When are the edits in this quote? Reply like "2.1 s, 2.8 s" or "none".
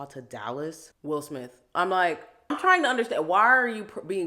0.9 s, 2.6 s